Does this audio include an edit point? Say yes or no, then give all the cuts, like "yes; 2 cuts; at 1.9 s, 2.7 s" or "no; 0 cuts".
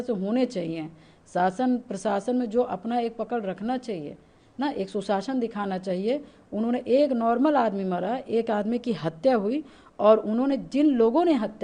no; 0 cuts